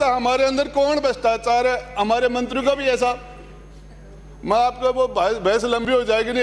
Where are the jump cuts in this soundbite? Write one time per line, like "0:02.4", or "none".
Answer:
none